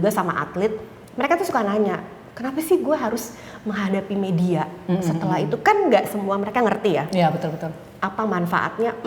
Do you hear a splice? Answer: no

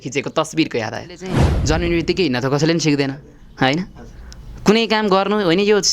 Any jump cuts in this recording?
yes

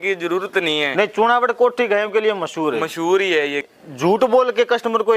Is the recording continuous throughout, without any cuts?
no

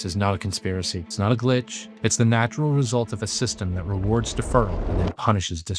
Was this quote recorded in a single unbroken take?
no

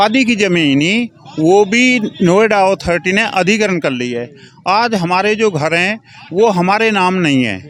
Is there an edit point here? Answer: no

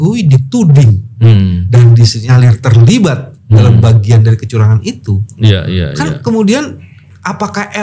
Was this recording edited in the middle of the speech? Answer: no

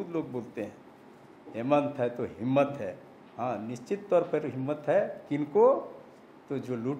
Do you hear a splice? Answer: no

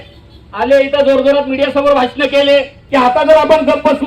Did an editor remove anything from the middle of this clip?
yes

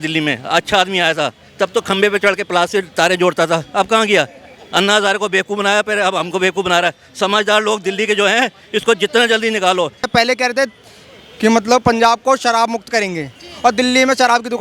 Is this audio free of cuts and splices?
no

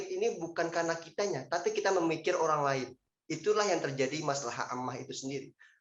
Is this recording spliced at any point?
no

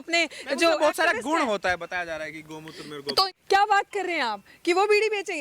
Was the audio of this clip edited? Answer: yes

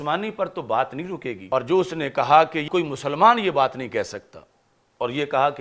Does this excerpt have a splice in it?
yes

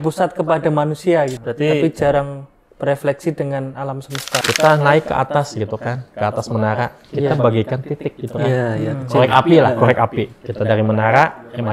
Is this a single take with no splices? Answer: no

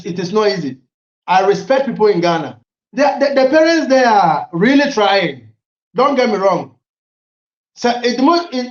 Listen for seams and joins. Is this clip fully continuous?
no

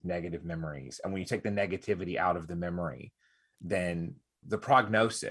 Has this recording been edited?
yes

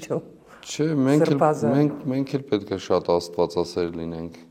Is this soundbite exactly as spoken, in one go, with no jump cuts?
yes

